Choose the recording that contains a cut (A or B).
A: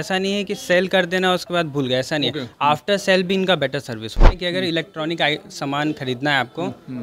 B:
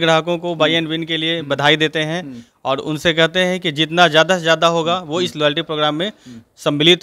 A